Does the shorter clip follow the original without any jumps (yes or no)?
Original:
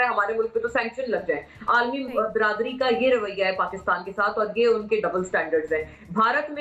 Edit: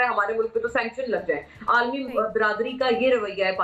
yes